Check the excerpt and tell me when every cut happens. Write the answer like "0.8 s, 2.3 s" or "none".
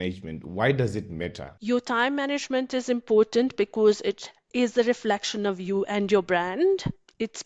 1.4 s